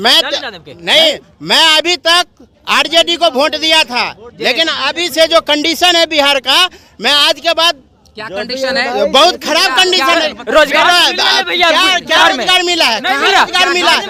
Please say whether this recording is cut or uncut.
uncut